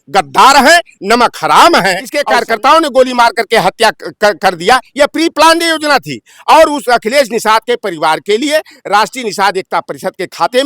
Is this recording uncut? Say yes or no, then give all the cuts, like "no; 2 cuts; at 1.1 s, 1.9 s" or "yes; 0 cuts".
no; 1 cut; at 2.1 s